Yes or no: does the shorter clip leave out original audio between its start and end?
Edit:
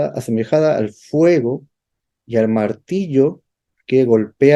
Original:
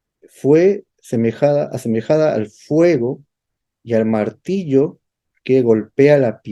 no